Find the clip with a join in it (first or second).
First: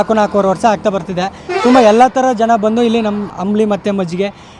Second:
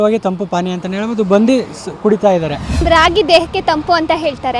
second